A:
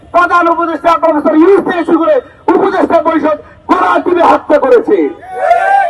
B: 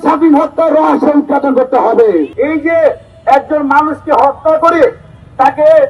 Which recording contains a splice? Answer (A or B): B